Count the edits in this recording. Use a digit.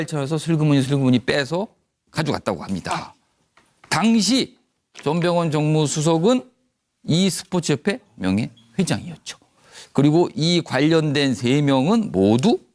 1